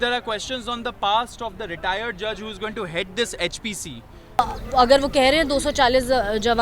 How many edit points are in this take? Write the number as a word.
one